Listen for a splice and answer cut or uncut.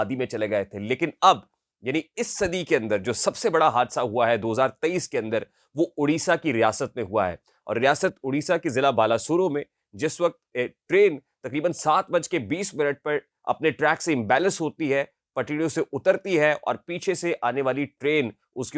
uncut